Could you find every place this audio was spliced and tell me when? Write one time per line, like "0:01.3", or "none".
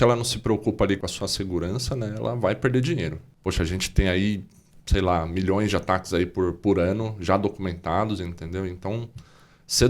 0:01.0
0:03.2

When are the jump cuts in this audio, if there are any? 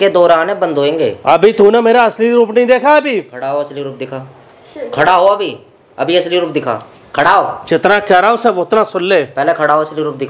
none

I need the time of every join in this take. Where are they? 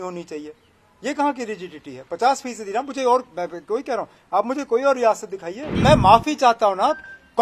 0:05.6

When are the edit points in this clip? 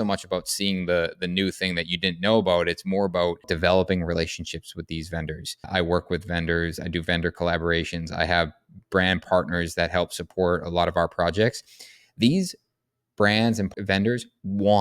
0:03.5
0:05.7
0:09.2
0:13.7

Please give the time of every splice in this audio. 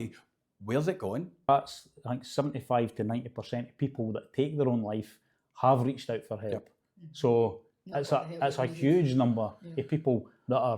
0:01.5

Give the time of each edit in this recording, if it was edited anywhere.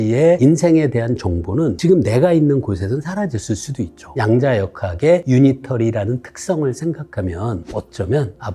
0:04.0
0:05.2
0:07.6

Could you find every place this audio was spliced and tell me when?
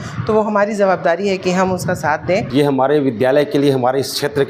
0:02.5

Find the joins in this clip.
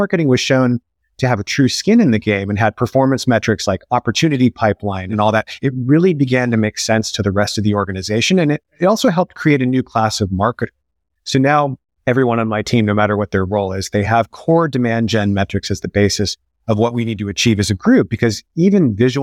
0:05.1
0:11.9

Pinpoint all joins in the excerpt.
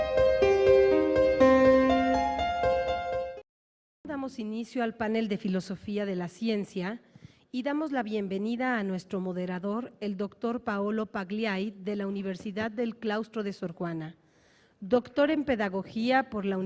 0:01.8

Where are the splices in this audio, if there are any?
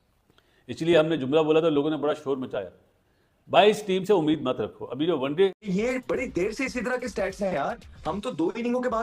0:05.6

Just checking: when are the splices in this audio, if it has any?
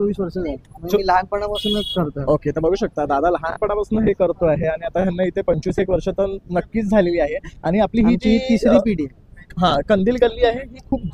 none

